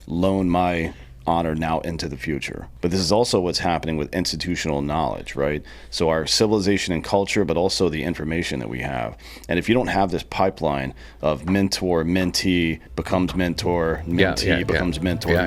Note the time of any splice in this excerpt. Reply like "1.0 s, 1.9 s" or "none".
2.6 s